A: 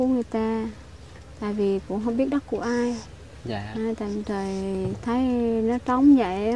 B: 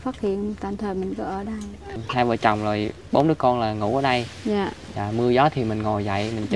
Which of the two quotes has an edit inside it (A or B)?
B